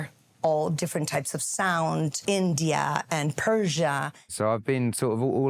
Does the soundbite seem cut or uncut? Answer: cut